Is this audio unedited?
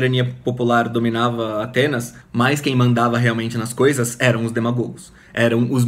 yes; 0 cuts

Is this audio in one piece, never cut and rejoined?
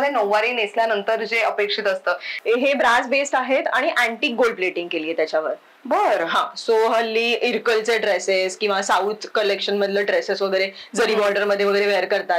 no; 1 cut; at 2.3 s

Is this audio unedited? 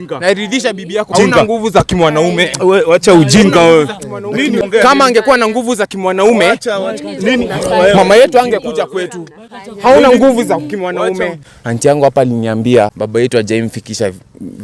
no; 4 cuts; at 1.1 s, 4.6 s, 11.5 s, 13.0 s

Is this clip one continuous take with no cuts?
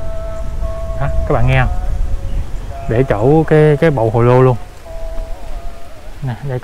yes; 0 cuts

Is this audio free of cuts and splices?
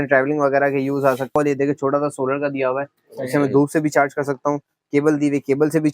no; 1 cut; at 1.3 s

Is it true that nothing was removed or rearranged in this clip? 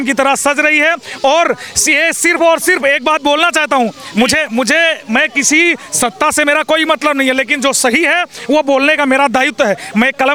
yes; 0 cuts

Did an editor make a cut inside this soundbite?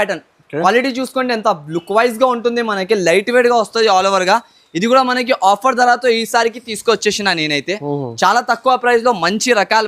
no; 0 cuts

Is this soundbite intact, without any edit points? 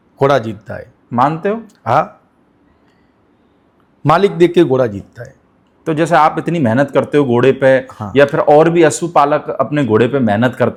yes; 0 cuts

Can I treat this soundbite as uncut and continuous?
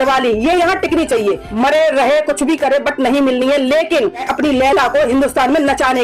no; 2 cuts; at 1.5 s, 4.3 s

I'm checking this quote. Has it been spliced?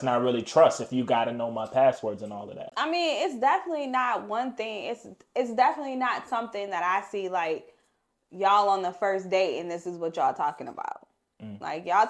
no; 0 cuts

